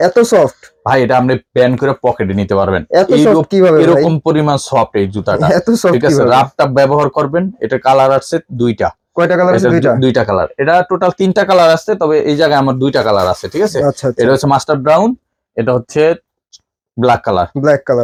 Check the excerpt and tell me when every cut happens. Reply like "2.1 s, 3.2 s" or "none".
none